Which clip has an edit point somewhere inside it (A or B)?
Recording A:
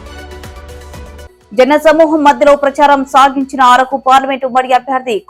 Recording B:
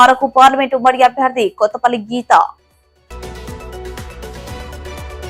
A